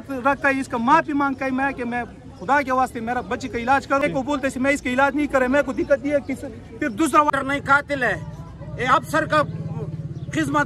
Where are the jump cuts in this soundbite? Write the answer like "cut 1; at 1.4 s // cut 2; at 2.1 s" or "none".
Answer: cut 1; at 4.0 s // cut 2; at 7.3 s